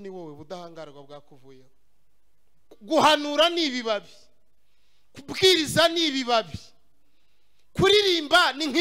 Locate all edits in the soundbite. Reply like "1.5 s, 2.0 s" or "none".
2.7 s